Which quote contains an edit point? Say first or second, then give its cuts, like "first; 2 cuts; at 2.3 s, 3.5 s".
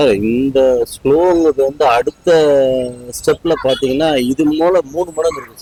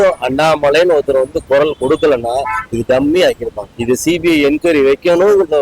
second; 1 cut; at 3.8 s